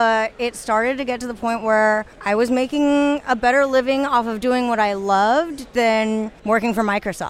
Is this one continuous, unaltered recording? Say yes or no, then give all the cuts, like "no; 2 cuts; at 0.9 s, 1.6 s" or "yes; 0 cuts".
no; 2 cuts; at 2.1 s, 6.3 s